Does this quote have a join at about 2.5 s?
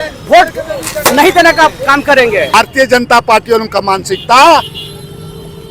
yes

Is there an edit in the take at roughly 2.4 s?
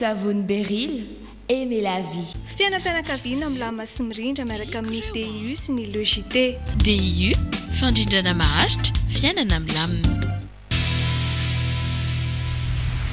yes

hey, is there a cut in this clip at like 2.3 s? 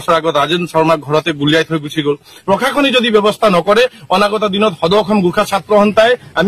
yes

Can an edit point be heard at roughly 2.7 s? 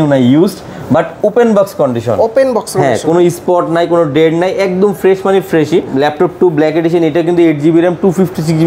no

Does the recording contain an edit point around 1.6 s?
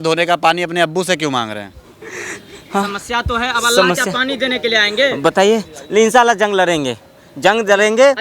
no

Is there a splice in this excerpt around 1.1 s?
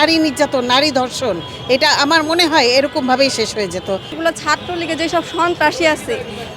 no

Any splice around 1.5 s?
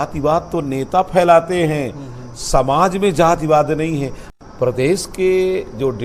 no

